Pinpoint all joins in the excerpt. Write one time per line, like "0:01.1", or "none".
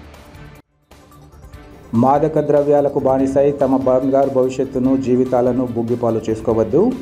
0:01.5